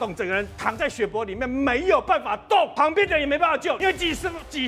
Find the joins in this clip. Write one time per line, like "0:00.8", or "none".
0:02.7
0:03.8